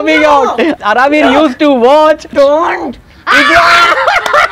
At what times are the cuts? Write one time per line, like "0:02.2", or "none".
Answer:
0:00.8
0:02.3